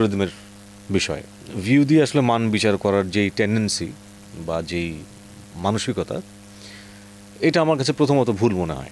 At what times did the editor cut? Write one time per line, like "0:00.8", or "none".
none

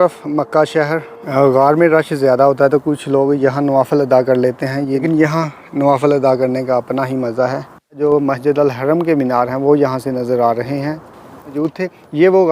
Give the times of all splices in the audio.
0:01.2
0:05.0
0:08.0
0:11.6

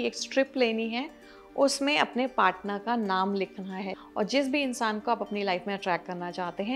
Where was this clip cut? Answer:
0:03.9

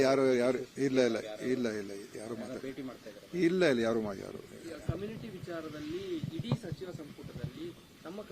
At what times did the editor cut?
0:06.9

